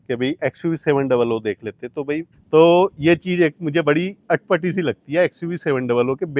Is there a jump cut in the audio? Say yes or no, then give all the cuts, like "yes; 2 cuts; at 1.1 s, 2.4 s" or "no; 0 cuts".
yes; 1 cut; at 2.3 s